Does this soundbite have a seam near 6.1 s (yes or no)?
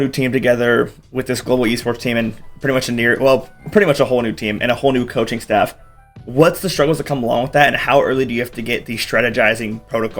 no